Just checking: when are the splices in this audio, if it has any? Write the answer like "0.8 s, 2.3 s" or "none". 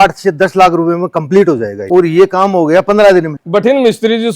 1.8 s, 3.4 s